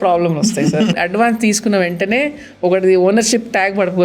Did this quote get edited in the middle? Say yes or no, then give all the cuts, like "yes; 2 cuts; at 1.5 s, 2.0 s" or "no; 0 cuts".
yes; 1 cut; at 0.9 s